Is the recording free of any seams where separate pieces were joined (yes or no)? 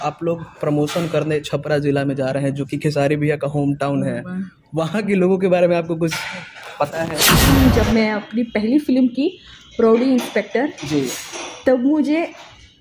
no